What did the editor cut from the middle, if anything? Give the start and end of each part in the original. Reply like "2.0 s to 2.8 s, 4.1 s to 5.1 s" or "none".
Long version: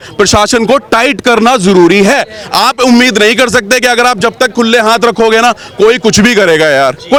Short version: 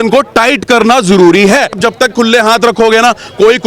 2.3 s to 4.2 s